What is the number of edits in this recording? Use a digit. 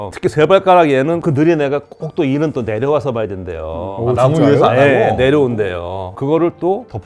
1